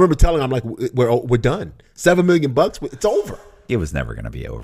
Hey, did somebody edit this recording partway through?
yes; 1 cut; at 3.7 s

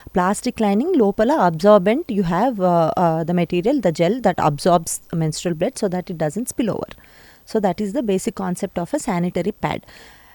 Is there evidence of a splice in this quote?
no; 0 cuts

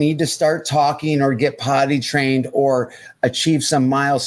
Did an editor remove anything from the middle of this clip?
no; 0 cuts

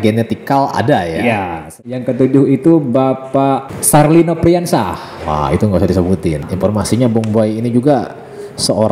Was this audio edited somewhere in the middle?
yes; 3 cuts; at 1.7 s, 3.7 s, 6.5 s

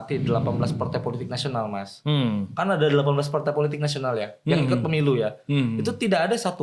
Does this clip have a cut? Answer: no; 0 cuts

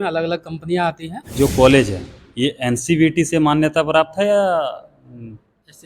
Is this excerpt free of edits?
no; 1 cut; at 1.2 s

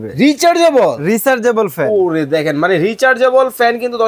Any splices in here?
no; 0 cuts

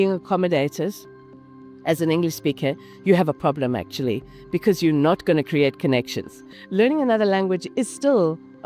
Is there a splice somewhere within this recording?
yes; 1 cut; at 6.5 s

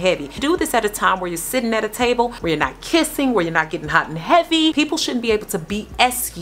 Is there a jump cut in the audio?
yes; 2 cuts; at 2.4 s, 4.7 s

